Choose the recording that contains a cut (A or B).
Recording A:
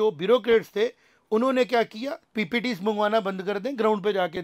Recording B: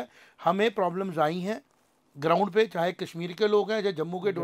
A